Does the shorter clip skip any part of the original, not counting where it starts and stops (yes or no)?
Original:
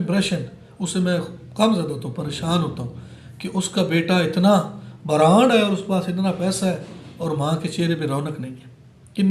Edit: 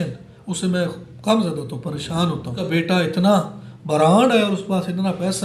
yes